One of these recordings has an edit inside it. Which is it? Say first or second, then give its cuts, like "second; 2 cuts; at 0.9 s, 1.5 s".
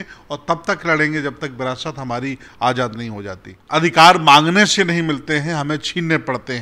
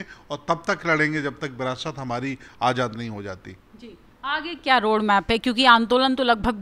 first; 1 cut; at 3.6 s